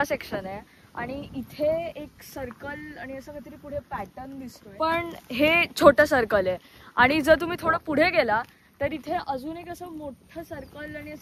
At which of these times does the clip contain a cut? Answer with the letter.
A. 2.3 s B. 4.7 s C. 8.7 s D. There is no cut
D